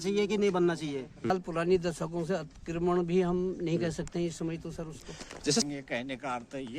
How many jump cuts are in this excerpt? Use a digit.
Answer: 2